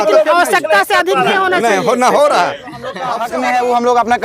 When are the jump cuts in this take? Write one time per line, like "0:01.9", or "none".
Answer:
0:03.1